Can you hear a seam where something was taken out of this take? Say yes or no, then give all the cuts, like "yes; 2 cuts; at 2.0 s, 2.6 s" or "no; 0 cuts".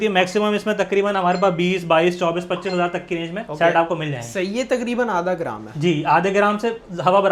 no; 0 cuts